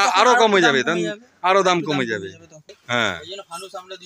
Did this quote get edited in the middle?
yes; 1 cut; at 2.8 s

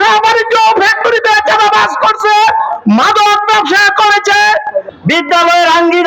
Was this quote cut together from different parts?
yes; 1 cut; at 4.9 s

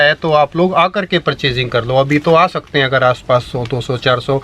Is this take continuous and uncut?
yes; 0 cuts

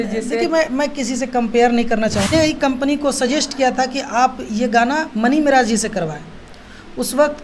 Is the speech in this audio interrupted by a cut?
yes; 1 cut; at 2.3 s

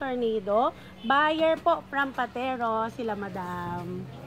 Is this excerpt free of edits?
yes; 0 cuts

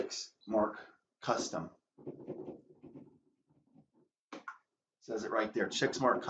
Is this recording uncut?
no; 1 cut; at 2.9 s

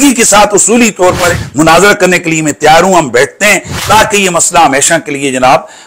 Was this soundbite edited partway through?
yes; 1 cut; at 1.4 s

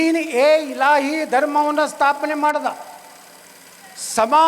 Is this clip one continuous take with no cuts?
yes; 0 cuts

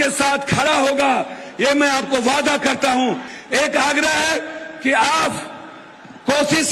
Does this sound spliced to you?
yes; 1 cut; at 3.3 s

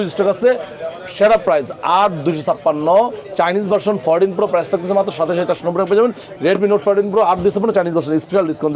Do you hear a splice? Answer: no; 0 cuts

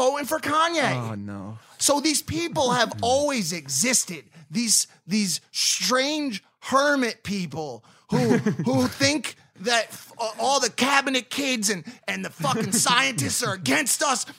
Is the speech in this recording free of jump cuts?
yes; 0 cuts

